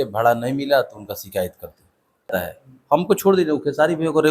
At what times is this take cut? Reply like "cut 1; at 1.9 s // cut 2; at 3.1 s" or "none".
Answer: cut 1; at 2.3 s